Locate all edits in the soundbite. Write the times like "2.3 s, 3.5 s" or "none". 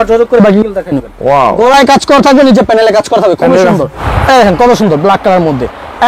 4.0 s